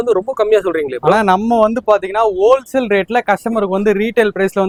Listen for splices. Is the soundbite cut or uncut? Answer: uncut